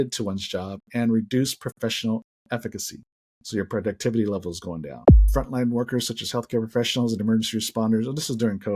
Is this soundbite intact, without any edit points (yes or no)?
no